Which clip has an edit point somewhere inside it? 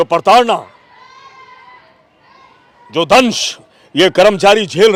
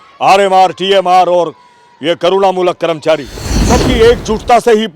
second; 1 cut; at 3.7 s

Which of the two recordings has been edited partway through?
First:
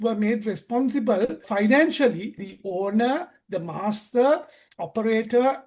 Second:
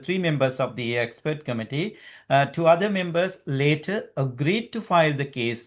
first; 2 cuts; at 1.5 s, 2.5 s

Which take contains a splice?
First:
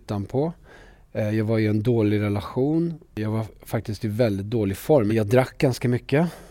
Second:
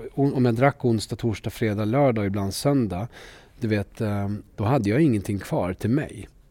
first; 2 cuts; at 3.2 s, 5.1 s

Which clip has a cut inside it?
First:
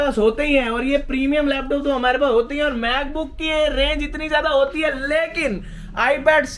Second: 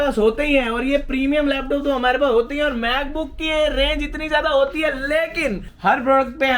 second; 1 cut; at 5.7 s

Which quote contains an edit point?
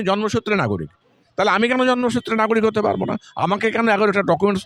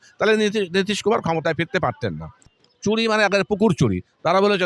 second; 1 cut; at 2.5 s

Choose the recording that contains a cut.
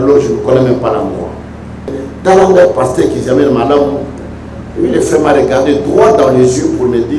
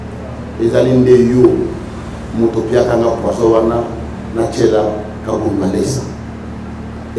first; 1 cut; at 2.1 s

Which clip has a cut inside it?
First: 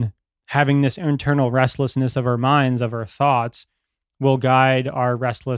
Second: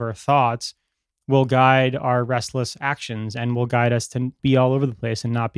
second; 1 cut; at 4.3 s

